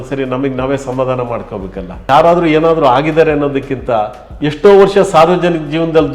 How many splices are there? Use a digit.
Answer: 1